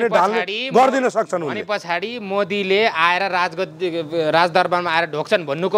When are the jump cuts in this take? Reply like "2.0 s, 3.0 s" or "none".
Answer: none